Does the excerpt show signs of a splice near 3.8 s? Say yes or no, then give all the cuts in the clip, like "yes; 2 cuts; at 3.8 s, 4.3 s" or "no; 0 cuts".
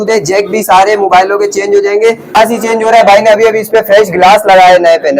no; 1 cut; at 2.4 s